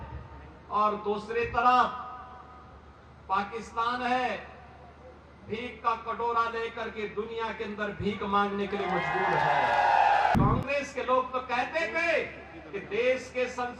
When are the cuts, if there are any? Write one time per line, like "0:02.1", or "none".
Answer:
0:10.4